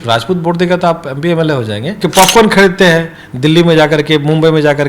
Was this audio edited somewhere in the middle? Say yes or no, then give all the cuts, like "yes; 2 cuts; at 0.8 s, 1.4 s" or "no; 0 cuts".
yes; 1 cut; at 2.0 s